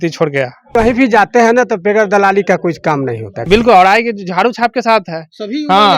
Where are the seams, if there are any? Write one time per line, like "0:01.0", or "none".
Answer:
0:00.8
0:03.5

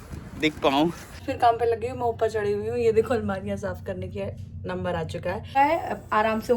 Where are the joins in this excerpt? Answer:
0:01.3
0:05.5

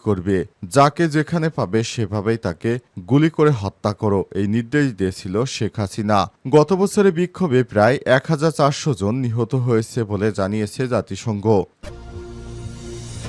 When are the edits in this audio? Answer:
0:11.7

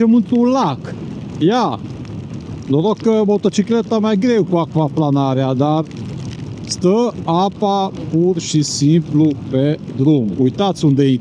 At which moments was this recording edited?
none

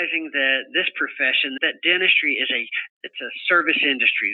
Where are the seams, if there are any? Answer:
0:01.6

